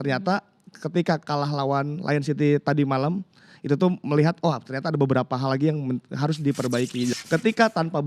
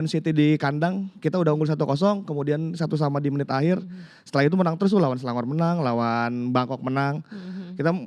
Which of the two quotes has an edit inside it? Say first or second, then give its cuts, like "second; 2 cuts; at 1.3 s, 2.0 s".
first; 1 cut; at 7.1 s